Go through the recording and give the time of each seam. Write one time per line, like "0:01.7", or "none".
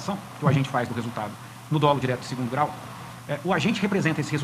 none